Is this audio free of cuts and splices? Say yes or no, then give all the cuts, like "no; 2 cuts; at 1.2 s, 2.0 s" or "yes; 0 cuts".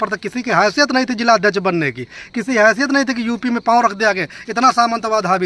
yes; 0 cuts